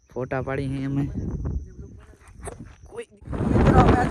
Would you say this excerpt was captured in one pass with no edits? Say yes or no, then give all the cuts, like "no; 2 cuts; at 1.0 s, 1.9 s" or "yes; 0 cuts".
no; 1 cut; at 2.9 s